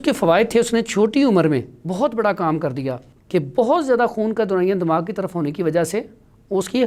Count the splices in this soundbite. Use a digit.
1